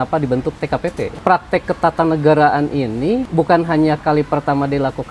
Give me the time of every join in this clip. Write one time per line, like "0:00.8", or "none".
0:01.2
0:03.3